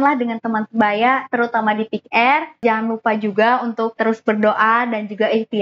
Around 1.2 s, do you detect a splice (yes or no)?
no